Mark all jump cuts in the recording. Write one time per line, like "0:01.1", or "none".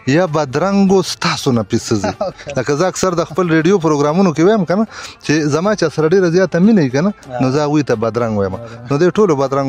none